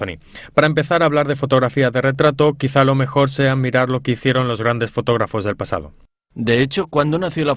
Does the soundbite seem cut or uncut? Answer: uncut